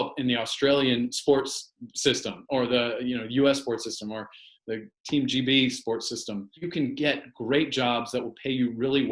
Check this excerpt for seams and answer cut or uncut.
cut